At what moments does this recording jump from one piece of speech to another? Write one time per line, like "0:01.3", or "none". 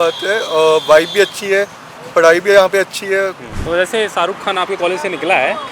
0:03.5